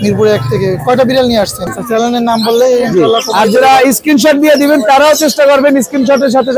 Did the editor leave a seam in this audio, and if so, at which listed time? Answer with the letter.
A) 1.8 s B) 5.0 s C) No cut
A